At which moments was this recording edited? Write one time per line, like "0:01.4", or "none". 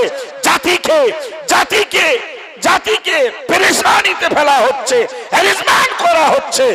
none

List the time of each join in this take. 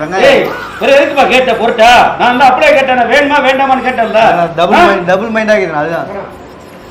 none

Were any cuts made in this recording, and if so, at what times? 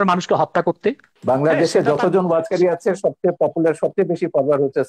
0:01.1

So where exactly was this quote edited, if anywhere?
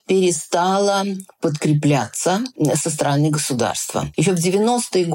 0:02.8
0:04.1

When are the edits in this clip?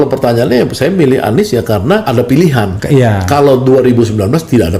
0:02.0
0:02.8

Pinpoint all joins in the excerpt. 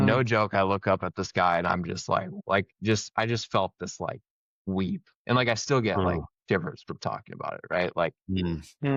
none

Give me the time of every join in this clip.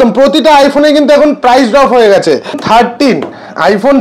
0:02.6

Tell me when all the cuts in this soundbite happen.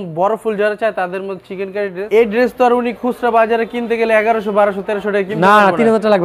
0:02.0

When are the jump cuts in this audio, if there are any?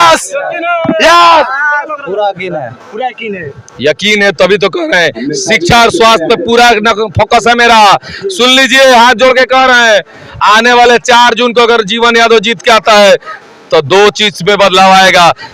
none

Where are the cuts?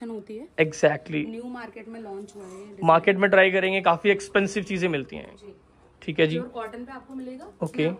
none

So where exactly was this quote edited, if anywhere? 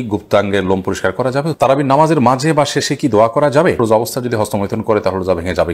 0:01.5
0:03.8

